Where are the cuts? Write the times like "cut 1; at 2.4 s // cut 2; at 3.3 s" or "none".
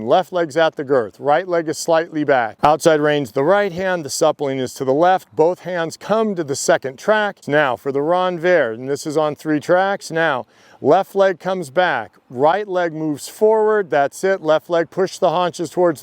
cut 1; at 2.5 s // cut 2; at 7.4 s